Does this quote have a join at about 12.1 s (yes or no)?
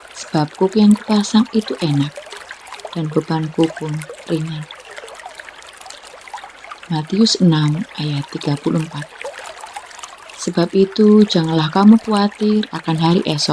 no